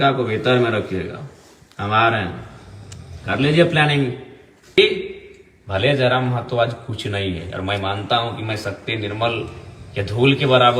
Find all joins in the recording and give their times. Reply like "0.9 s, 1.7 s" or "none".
4.8 s